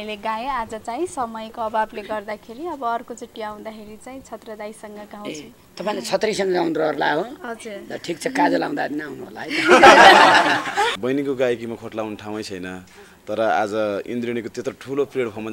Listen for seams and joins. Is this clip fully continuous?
no; 1 cut; at 11.0 s

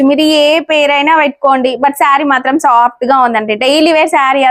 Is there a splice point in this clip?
no; 0 cuts

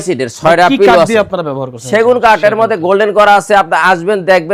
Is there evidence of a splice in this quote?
no; 0 cuts

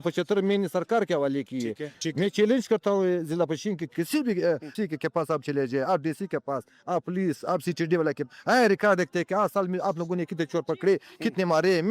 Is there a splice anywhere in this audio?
yes; 2 cuts; at 1.9 s, 4.7 s

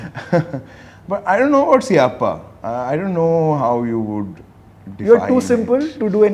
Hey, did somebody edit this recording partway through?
no; 0 cuts

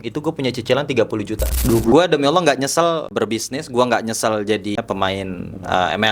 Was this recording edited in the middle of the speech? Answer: yes; 3 cuts; at 1.9 s, 3.1 s, 4.8 s

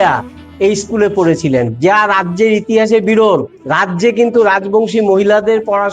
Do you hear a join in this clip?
yes; 1 cut; at 3.6 s

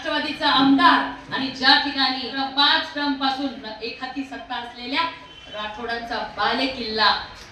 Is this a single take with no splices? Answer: no; 1 cut; at 2.3 s

